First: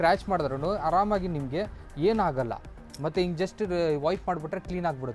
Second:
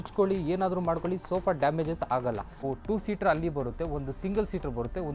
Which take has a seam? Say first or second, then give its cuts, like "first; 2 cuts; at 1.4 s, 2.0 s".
second; 1 cut; at 2.6 s